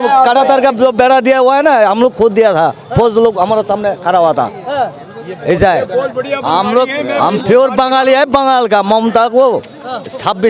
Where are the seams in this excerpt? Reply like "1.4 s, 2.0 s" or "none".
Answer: none